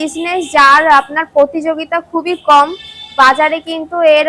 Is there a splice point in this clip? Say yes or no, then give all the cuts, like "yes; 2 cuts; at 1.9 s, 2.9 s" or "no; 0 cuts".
no; 0 cuts